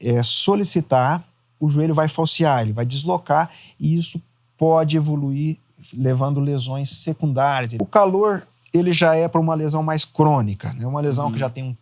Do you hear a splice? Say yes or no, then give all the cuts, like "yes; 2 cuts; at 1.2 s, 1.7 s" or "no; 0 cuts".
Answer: yes; 1 cut; at 7.7 s